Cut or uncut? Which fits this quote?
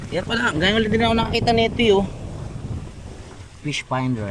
uncut